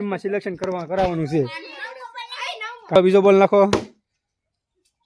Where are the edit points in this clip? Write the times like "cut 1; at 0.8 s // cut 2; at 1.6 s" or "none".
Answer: cut 1; at 3.0 s